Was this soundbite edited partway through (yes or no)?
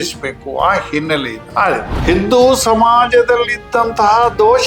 yes